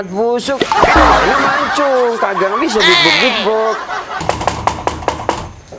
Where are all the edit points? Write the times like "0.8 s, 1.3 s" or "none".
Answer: 4.2 s

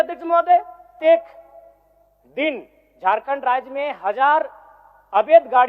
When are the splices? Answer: 1.0 s

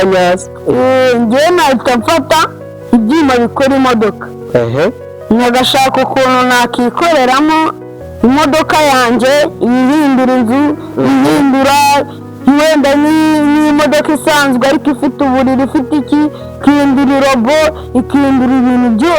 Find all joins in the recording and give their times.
none

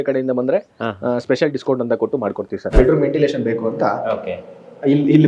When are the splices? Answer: 2.7 s

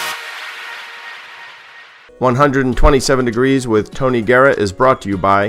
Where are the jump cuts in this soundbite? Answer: 2.0 s

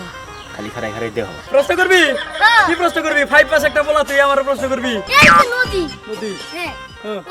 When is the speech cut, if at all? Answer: 1.4 s, 5.1 s

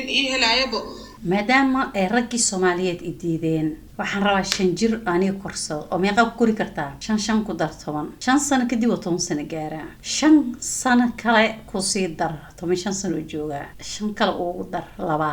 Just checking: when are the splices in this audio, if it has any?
1.1 s

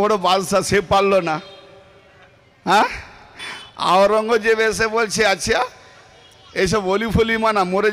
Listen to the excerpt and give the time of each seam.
none

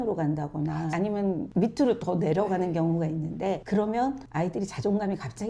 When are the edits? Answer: 0.9 s

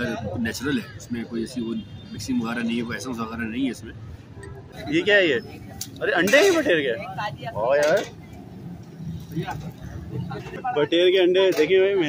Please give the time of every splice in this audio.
4.7 s, 10.6 s

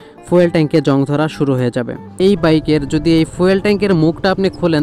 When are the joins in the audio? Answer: 2.2 s

